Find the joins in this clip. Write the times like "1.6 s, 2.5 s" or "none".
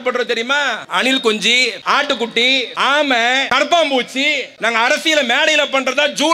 0.8 s, 1.8 s, 2.7 s, 3.5 s, 4.5 s